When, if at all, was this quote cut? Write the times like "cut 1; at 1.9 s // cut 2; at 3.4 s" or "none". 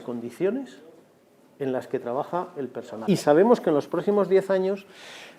cut 1; at 3.0 s

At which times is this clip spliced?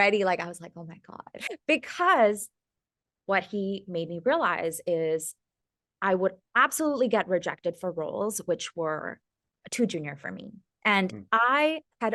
none

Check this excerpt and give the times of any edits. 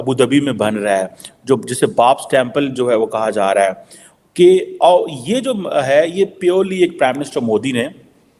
none

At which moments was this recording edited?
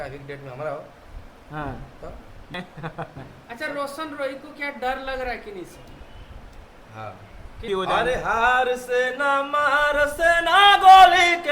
cut 1; at 2.5 s // cut 2; at 7.6 s

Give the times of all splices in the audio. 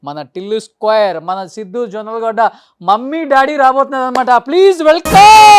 none

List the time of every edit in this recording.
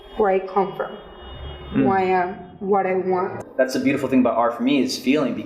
cut 1; at 3.4 s

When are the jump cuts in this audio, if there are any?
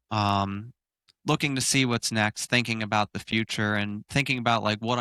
none

